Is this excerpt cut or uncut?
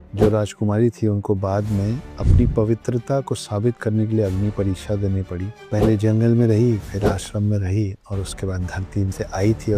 uncut